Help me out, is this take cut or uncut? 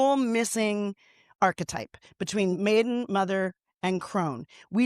cut